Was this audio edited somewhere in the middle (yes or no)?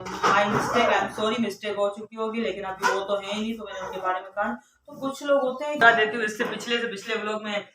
yes